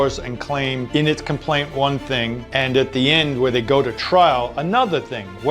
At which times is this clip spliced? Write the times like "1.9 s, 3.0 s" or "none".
0.8 s, 2.4 s